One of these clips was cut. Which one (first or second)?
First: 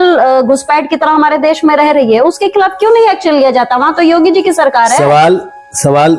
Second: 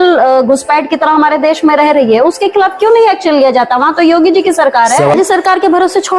second